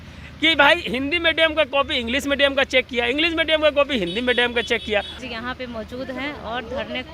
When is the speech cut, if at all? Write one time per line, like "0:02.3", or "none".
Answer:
0:05.1